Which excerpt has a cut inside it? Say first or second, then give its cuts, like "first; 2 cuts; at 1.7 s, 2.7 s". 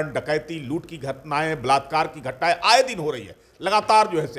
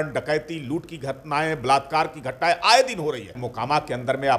second; 1 cut; at 3.4 s